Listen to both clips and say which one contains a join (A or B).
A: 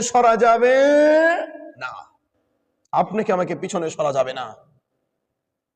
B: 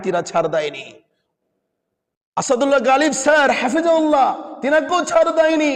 B